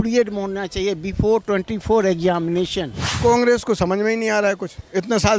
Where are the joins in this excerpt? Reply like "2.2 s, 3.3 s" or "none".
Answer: 3.0 s